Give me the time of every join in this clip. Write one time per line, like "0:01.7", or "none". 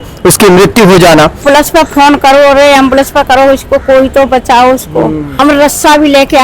0:01.4
0:05.3